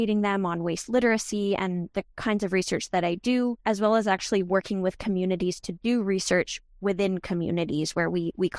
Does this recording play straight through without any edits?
yes; 0 cuts

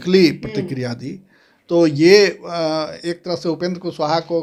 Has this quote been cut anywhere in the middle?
no; 0 cuts

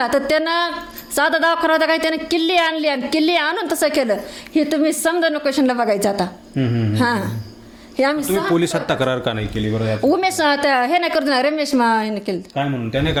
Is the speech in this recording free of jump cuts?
yes; 0 cuts

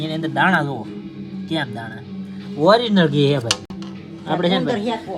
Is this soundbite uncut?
yes; 0 cuts

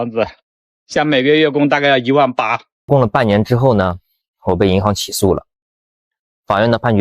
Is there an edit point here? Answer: yes; 1 cut; at 2.9 s

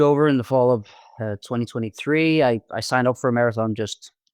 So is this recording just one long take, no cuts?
yes; 0 cuts

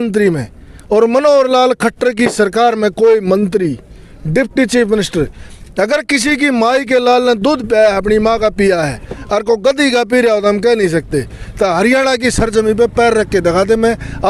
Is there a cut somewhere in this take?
no; 0 cuts

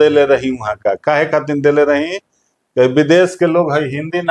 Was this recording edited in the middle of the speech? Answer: no; 0 cuts

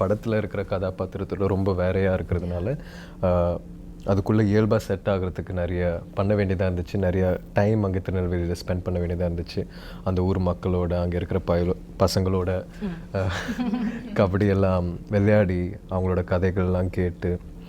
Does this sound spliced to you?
no; 0 cuts

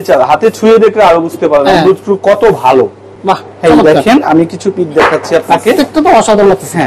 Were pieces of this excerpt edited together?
no; 0 cuts

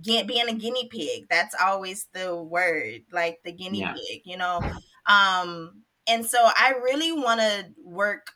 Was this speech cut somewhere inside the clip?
no; 0 cuts

